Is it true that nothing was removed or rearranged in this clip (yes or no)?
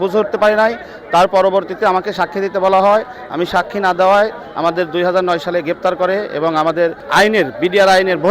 yes